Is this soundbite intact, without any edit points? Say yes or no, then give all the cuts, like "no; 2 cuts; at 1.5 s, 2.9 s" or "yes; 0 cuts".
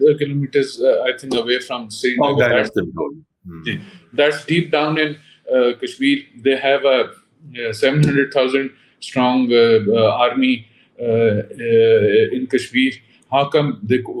yes; 0 cuts